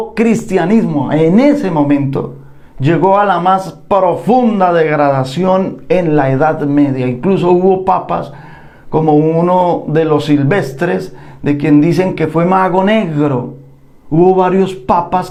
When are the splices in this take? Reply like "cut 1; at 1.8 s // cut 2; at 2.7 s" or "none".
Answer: none